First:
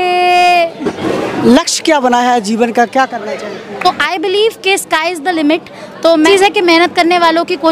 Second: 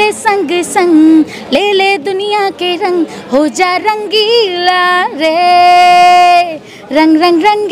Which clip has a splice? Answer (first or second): first